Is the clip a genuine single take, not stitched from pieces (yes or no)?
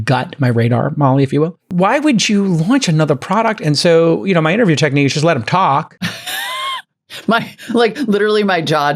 no